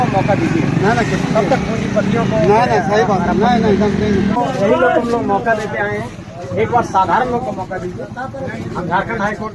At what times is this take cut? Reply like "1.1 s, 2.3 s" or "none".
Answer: 4.4 s